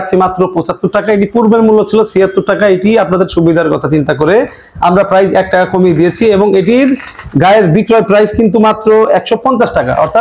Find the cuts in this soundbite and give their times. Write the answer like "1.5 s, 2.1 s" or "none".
none

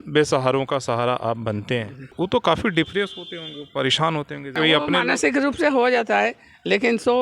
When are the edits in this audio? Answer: 2.0 s, 4.5 s

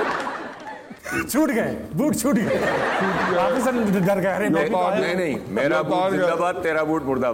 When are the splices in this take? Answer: 1.0 s

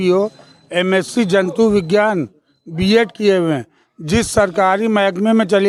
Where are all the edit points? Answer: none

